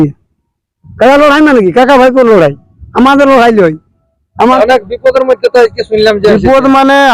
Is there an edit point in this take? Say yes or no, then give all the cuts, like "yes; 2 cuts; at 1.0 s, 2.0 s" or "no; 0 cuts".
yes; 1 cut; at 4.4 s